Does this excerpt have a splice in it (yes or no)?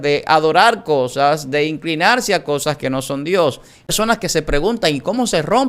yes